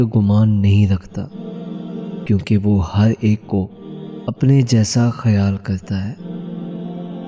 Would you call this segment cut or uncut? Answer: cut